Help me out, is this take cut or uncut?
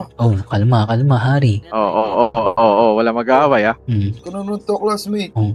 uncut